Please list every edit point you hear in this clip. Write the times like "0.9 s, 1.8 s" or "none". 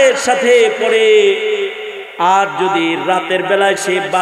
none